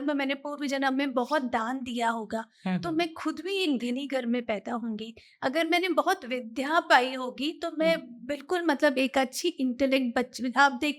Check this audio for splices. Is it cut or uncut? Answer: uncut